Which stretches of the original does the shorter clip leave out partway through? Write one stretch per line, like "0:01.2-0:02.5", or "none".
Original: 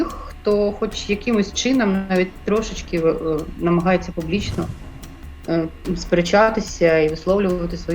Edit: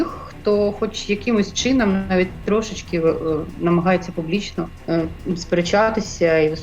0:04.8-0:05.4